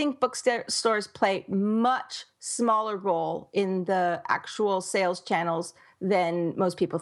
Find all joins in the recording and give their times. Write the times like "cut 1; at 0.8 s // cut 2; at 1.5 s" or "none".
none